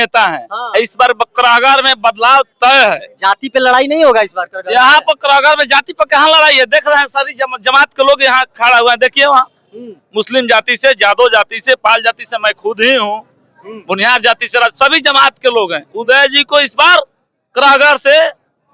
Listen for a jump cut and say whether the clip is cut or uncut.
uncut